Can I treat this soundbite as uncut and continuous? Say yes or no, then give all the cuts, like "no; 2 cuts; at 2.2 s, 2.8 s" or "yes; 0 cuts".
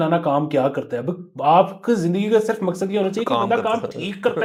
yes; 0 cuts